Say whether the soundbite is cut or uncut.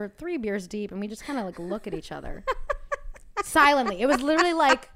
uncut